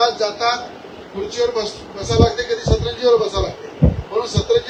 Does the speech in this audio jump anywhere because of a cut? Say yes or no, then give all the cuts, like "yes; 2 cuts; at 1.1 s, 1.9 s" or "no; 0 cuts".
no; 0 cuts